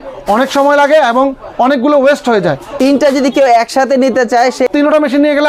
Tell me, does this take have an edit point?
yes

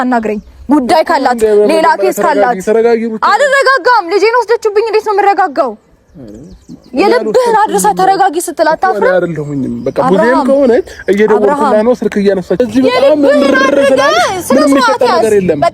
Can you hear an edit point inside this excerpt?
yes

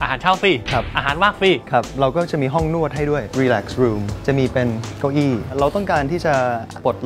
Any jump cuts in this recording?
no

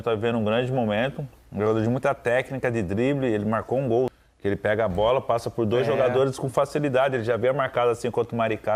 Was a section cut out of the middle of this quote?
no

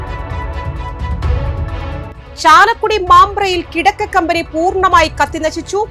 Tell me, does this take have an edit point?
no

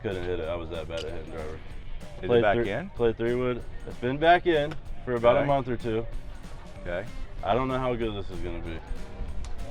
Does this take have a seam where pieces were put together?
yes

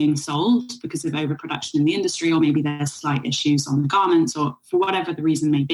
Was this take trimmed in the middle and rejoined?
no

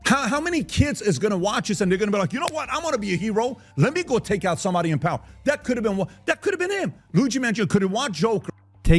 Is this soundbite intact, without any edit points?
yes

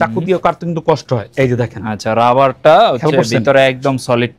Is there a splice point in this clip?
no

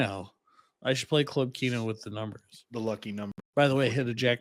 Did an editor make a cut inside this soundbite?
yes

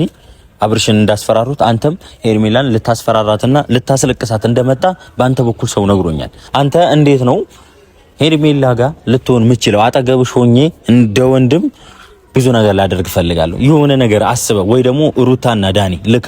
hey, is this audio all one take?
no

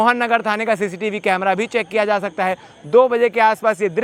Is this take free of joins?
yes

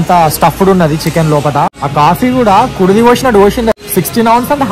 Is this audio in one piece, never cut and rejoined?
no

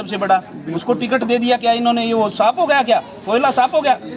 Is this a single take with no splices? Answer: yes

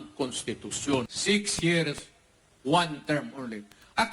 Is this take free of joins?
no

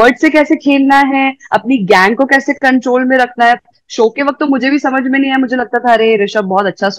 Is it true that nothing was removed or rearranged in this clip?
yes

